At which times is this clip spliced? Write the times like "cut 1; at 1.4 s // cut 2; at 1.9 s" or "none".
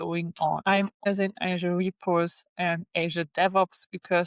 cut 1; at 1.1 s